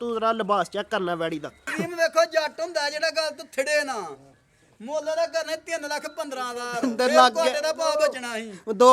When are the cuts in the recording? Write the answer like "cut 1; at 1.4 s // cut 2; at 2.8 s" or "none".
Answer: cut 1; at 1.8 s